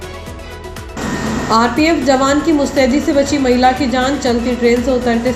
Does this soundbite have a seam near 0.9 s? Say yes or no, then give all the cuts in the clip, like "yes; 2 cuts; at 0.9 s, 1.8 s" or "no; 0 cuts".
yes; 1 cut; at 0.9 s